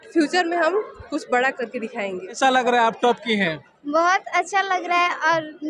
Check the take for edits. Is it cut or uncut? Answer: uncut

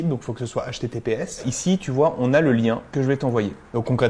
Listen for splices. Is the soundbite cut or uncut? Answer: uncut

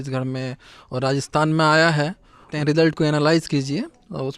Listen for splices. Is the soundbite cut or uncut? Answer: cut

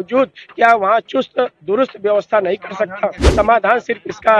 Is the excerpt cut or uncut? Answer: cut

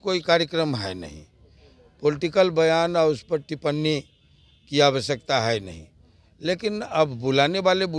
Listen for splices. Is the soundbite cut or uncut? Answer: uncut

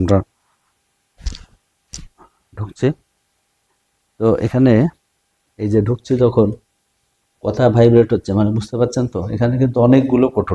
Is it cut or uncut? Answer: uncut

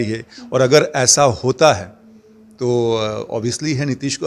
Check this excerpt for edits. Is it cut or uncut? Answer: uncut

